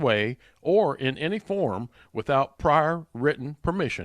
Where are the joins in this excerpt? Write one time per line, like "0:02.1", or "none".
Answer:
none